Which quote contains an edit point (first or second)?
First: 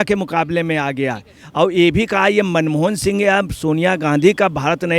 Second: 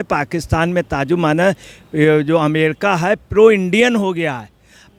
first